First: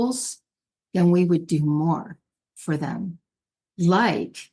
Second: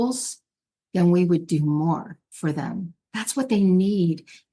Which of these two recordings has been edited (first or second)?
second